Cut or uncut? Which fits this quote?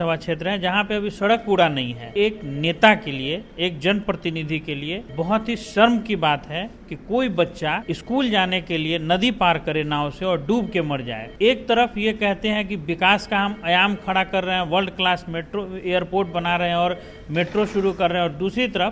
cut